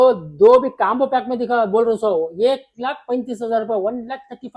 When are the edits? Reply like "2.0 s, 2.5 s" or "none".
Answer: none